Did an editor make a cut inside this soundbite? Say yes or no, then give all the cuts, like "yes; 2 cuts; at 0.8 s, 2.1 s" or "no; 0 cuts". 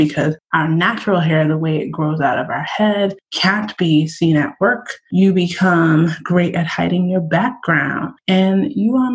yes; 1 cut; at 8.1 s